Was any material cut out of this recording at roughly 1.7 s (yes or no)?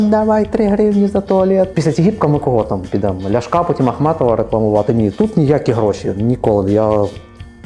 yes